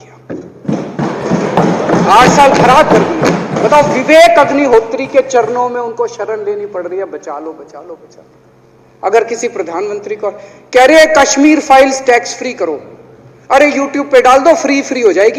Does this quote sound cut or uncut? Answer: uncut